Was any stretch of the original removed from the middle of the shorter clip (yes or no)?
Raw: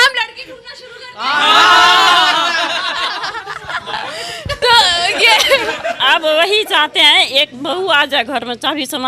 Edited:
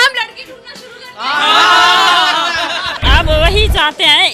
yes